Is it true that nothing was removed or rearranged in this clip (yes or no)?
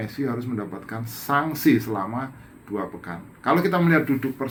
yes